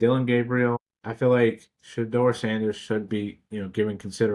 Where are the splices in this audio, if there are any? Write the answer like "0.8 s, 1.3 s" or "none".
0.9 s